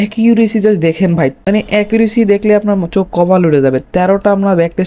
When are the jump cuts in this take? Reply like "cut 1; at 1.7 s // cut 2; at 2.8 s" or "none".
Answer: cut 1; at 1.4 s